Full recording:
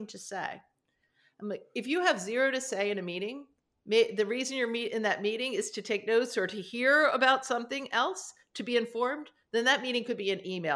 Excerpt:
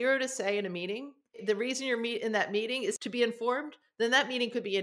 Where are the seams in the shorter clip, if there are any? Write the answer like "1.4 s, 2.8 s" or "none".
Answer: 1.4 s, 3.0 s